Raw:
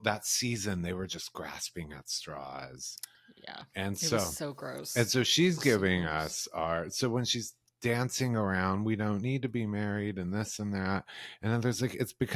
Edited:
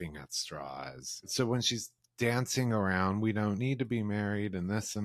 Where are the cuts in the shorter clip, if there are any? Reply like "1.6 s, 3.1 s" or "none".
1.3 s

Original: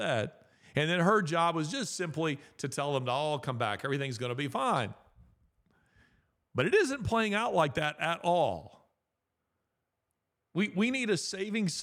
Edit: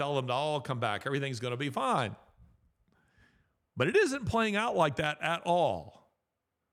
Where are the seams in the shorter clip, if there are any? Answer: none

